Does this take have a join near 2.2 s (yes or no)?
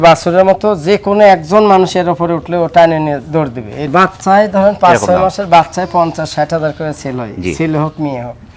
no